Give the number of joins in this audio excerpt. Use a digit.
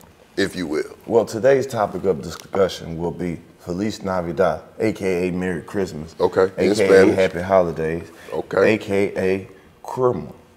0